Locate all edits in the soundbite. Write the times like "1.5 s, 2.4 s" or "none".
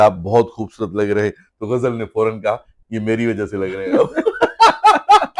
none